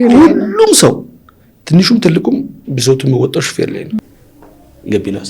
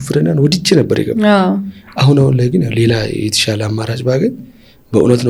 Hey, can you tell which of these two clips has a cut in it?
first; 1 cut; at 4.0 s

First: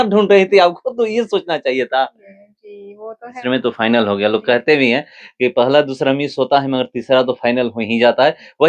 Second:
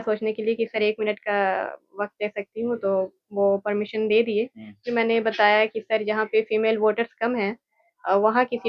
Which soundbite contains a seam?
first; 1 cut; at 3.2 s

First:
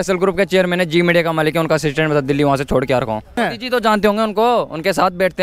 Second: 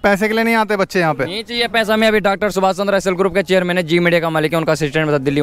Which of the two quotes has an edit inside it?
first; 1 cut; at 3.4 s

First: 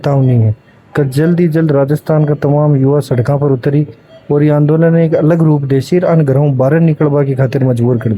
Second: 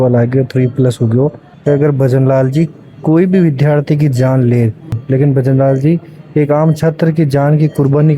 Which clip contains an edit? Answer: second; 2 cuts; at 1.5 s, 5.0 s

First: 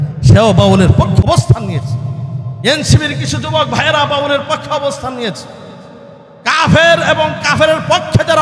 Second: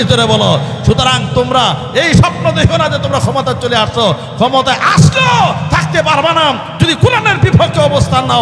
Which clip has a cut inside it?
first; 1 cut; at 1.2 s

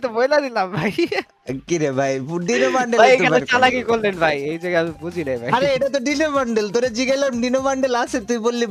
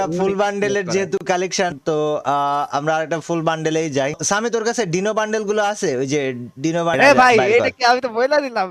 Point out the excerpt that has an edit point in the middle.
second; 3 cuts; at 1.8 s, 4.2 s, 6.9 s

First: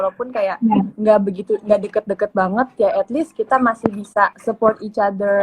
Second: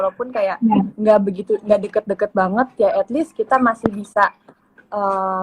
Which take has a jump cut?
first; 1 cut; at 4.4 s

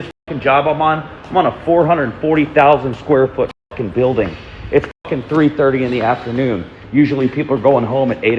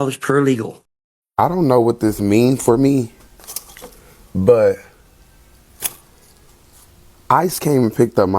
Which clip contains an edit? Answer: second; 1 cut; at 1.5 s

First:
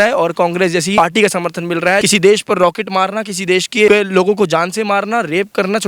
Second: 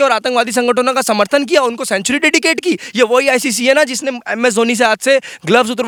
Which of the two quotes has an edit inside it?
first; 3 cuts; at 1.0 s, 2.0 s, 3.9 s

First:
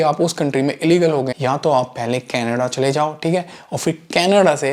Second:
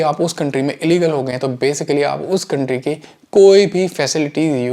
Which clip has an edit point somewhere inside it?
first; 1 cut; at 1.3 s

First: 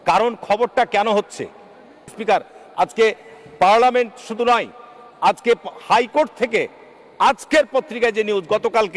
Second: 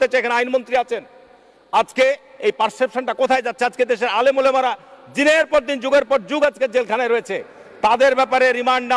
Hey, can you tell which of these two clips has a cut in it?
first; 1 cut; at 2.2 s

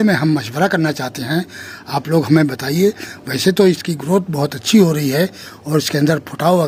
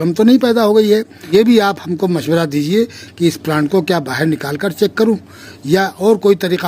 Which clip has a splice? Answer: second; 1 cut; at 1.3 s

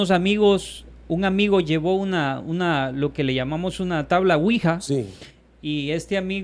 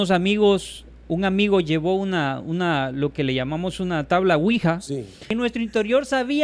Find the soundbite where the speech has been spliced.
second; 1 cut; at 5.3 s

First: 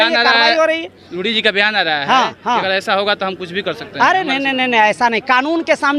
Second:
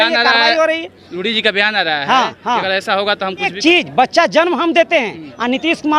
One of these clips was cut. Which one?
second; 1 cut; at 3.5 s

